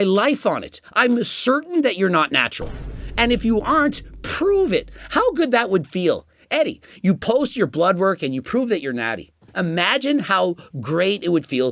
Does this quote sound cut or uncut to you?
uncut